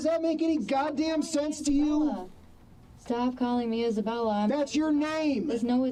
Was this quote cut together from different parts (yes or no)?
no